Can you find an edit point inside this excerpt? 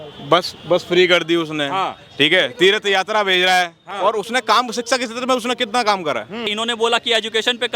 yes; 2 cuts; at 3.8 s, 6.5 s

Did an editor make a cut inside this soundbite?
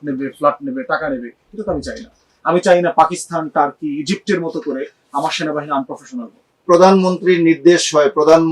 yes; 1 cut; at 6.6 s

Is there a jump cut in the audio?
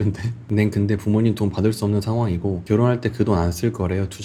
no; 0 cuts

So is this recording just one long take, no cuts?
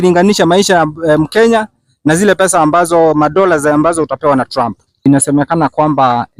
no; 1 cut; at 5.0 s

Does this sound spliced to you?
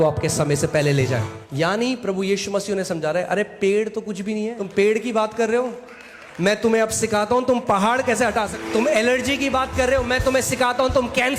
yes; 3 cuts; at 1.4 s, 4.6 s, 8.5 s

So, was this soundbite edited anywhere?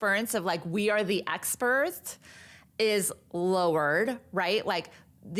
no; 0 cuts

